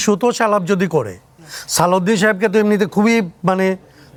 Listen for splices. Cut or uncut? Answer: uncut